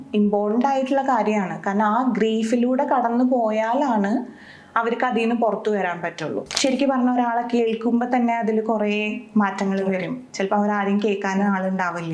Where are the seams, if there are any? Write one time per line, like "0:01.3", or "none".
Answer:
0:06.4